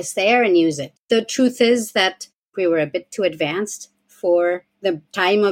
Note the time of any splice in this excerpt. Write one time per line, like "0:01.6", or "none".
0:00.9
0:02.5